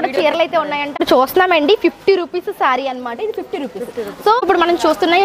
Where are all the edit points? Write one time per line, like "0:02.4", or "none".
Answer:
0:01.0
0:04.4

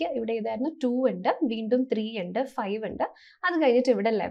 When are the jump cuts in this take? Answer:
none

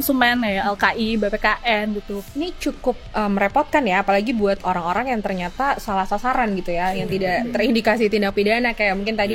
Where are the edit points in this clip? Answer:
0:02.2

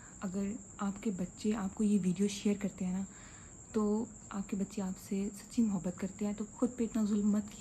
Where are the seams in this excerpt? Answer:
0:06.5

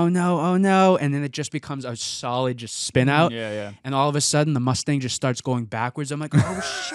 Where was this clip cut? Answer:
none

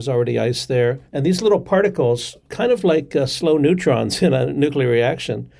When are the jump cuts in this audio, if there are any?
none

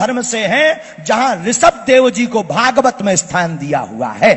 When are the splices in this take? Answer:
none

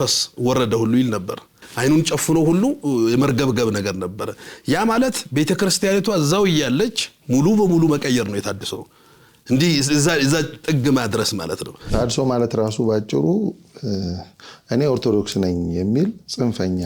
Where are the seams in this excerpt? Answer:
0:01.7
0:11.9

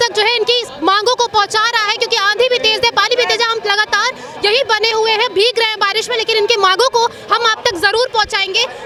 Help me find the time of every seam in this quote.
none

